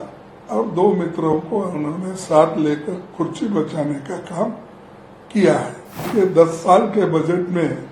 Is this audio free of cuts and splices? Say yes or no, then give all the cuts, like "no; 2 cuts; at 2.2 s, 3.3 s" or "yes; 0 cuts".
no; 1 cut; at 6.0 s